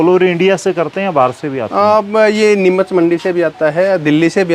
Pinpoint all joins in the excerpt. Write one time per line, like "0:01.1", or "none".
none